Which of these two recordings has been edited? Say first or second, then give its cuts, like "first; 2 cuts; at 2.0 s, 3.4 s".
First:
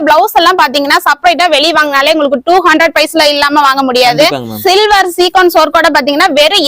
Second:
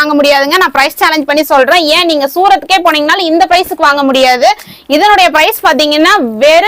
first; 1 cut; at 4.5 s